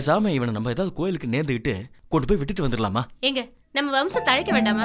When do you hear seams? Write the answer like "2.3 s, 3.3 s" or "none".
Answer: none